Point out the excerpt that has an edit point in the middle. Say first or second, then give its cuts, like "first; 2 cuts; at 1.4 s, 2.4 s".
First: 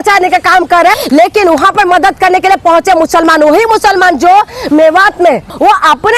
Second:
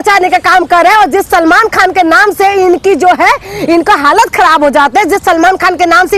first; 1 cut; at 0.9 s